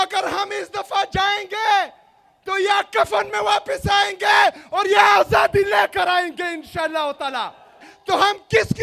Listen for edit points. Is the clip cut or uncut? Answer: cut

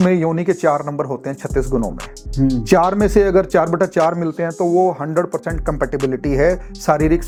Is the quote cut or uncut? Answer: uncut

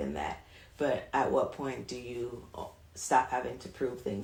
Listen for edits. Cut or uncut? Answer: uncut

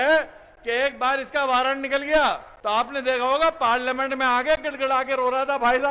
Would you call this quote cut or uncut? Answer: cut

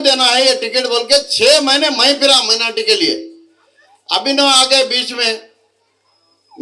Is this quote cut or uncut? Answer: uncut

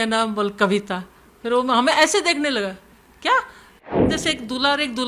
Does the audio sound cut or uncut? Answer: cut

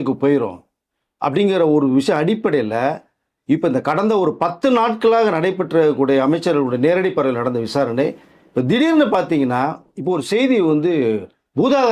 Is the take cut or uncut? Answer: uncut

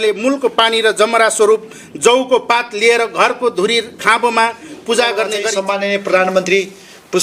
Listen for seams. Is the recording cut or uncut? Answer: cut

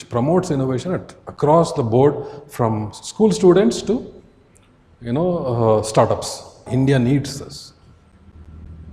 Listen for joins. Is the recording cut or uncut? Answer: cut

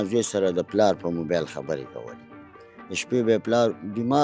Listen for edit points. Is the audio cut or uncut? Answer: uncut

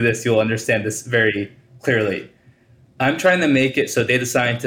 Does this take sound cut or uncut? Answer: cut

